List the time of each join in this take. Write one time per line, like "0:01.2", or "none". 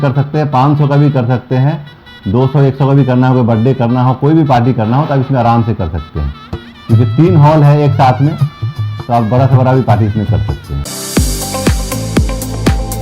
0:10.8